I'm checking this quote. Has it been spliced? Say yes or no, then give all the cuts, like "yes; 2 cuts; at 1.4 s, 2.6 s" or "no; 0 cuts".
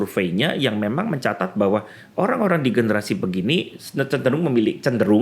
no; 0 cuts